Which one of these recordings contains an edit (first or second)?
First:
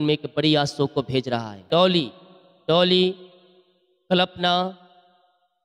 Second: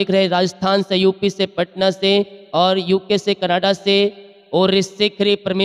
first